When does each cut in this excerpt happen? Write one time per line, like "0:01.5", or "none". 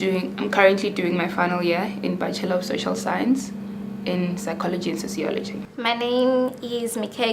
0:03.6